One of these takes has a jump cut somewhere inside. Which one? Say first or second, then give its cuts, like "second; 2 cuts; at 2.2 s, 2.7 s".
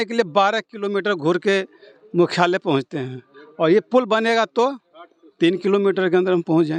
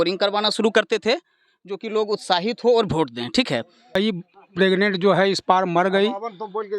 second; 1 cut; at 4.0 s